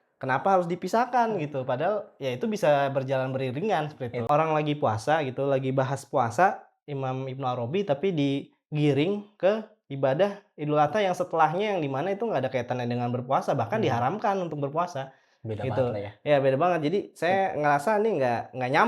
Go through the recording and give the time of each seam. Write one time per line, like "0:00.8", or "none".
0:04.3

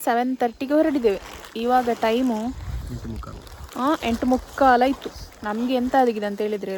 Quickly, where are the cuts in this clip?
none

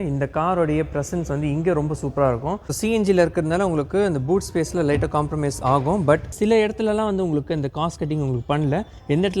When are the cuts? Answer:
0:02.6
0:06.3

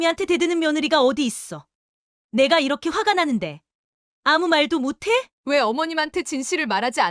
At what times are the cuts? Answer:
0:05.3

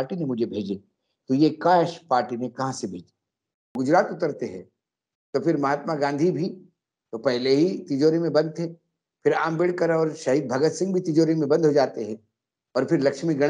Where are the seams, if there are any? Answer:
0:03.7

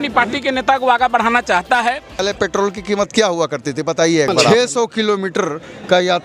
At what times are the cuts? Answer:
0:02.2
0:04.5

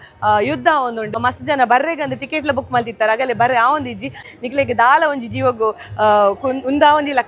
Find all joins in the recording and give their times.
0:01.2
0:04.2

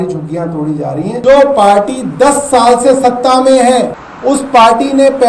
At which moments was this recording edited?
0:01.1
0:04.0

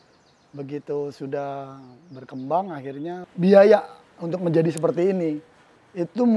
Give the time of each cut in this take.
0:03.2

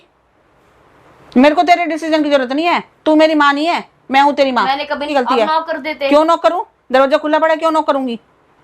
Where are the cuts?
0:05.1

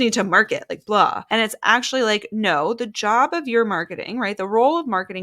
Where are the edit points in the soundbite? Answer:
0:01.2

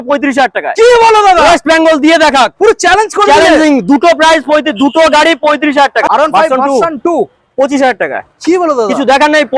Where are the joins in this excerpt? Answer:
0:06.1

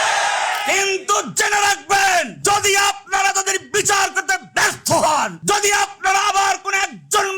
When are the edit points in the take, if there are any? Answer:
0:02.3
0:05.4

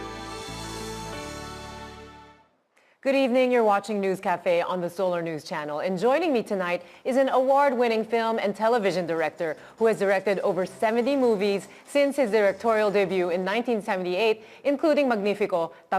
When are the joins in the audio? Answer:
0:03.0

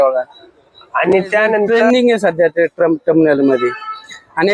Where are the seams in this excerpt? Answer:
0:01.7

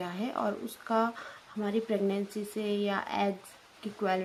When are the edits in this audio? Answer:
none

